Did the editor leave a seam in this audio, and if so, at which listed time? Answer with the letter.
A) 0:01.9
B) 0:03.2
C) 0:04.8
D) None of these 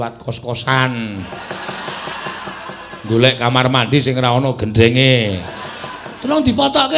D